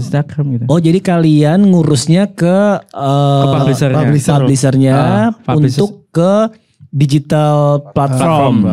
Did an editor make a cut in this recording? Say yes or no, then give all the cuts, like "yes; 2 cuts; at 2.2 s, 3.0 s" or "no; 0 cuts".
no; 0 cuts